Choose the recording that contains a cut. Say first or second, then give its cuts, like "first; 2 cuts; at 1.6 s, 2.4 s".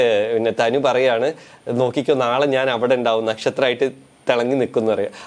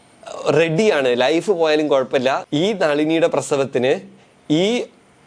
second; 1 cut; at 2.4 s